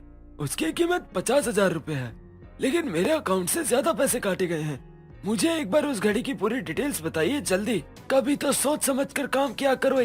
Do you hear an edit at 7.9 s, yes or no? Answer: yes